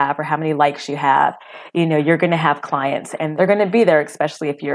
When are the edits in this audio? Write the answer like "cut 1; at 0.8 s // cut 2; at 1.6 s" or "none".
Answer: cut 1; at 3.2 s